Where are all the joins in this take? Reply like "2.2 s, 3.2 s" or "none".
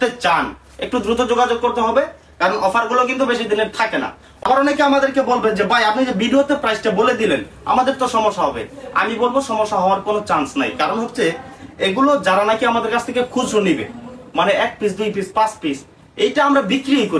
4.3 s

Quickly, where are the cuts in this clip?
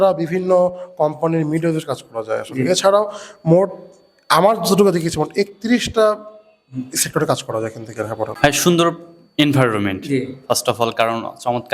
8.3 s

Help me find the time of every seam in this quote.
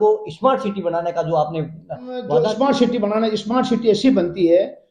2.2 s

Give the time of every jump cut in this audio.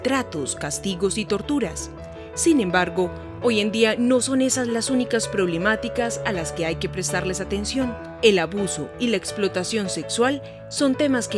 6.2 s

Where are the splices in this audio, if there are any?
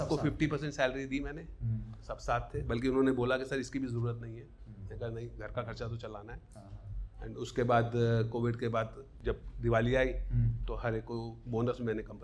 9.1 s

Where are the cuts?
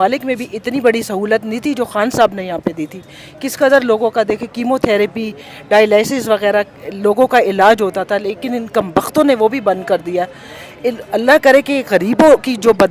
none

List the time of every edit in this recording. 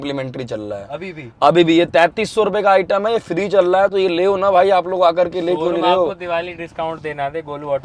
none

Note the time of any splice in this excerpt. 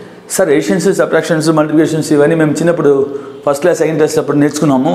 none

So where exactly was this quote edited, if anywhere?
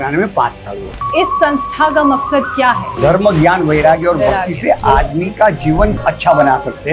0.9 s, 6.0 s

